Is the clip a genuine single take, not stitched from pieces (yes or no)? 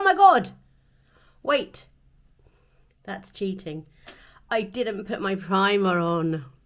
yes